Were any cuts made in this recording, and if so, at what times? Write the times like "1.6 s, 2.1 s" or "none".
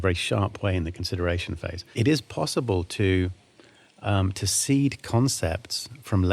1.8 s